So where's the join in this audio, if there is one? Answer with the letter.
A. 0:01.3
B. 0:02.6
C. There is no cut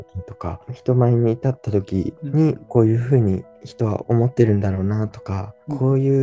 B